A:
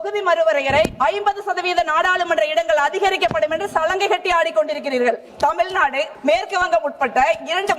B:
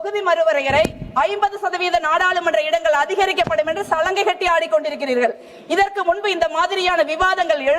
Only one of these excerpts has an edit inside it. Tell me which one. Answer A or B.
A